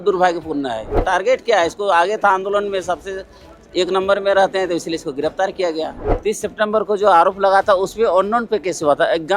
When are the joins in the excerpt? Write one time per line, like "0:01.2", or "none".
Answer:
0:01.0
0:06.0